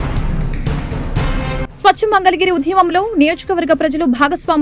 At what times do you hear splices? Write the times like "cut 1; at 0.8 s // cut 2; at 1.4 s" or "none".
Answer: none